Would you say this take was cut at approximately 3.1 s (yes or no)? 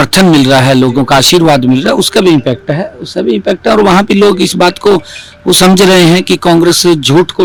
no